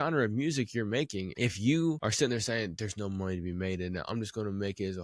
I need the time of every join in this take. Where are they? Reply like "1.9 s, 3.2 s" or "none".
1.3 s, 2.0 s